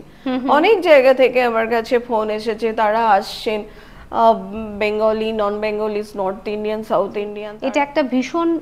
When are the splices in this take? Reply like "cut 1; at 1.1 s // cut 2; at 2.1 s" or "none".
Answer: cut 1; at 7.4 s